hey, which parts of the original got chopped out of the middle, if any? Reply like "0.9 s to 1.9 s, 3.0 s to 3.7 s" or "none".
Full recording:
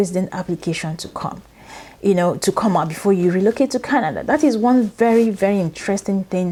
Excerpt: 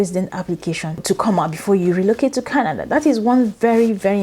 1.0 s to 2.4 s